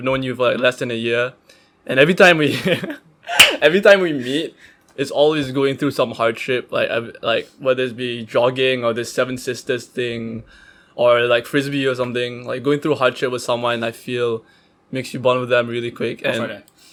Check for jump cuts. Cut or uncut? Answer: uncut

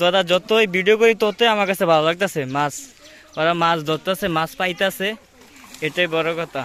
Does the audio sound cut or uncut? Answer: uncut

